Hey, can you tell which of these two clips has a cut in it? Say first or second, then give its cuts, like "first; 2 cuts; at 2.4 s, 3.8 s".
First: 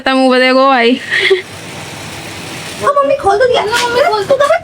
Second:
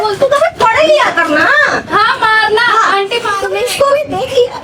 first; 1 cut; at 2.9 s